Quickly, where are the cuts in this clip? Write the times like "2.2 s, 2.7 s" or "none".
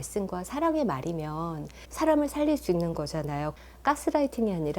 3.5 s